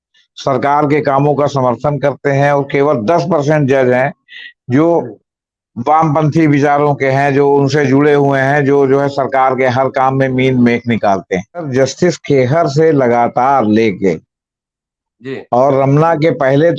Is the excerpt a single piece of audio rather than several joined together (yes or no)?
no